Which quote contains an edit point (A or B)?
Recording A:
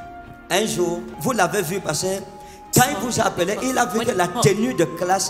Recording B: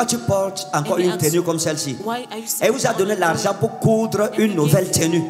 A